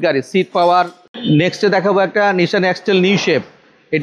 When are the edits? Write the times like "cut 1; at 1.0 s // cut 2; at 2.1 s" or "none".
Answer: cut 1; at 1.0 s